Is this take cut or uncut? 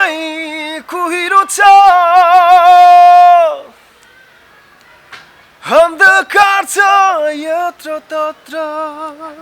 uncut